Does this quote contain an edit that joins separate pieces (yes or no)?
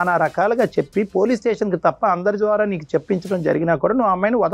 no